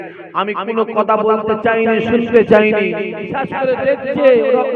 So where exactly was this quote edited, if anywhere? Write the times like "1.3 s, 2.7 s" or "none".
3.3 s